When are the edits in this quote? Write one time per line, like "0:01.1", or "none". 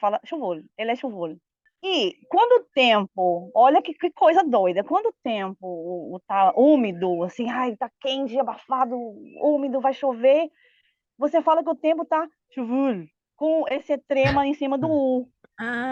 0:01.7